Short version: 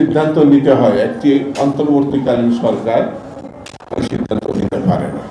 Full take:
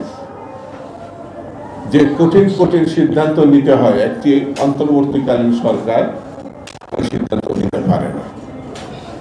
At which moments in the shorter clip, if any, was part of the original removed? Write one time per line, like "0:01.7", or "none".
none